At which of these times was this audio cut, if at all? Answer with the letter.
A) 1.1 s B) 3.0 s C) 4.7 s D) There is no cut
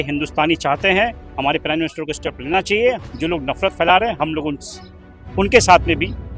B